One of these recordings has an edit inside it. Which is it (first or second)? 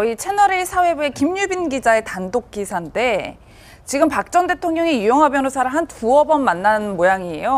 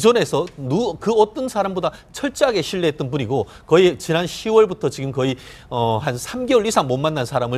second